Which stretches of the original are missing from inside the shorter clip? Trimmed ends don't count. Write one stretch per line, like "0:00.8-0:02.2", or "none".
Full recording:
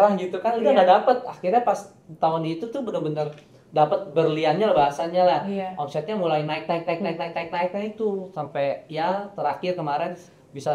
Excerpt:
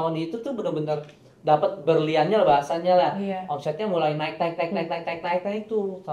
none